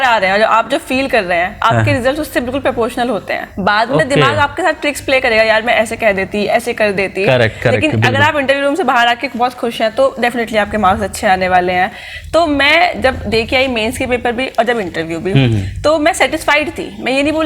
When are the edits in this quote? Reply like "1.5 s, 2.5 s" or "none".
none